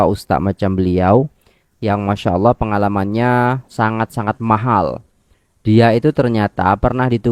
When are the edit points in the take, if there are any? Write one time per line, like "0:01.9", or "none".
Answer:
none